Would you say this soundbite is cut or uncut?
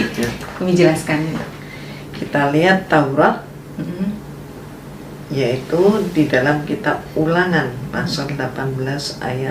cut